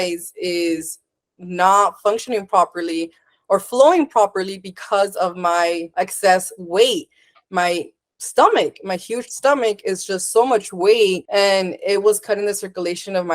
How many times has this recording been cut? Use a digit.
2